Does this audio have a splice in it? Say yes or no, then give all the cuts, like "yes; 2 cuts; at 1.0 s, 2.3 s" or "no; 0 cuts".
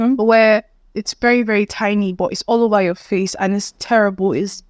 no; 0 cuts